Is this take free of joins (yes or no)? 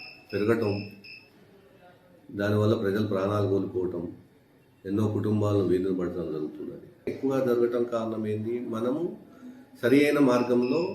no